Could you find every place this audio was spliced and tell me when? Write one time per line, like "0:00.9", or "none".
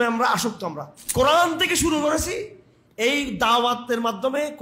0:00.9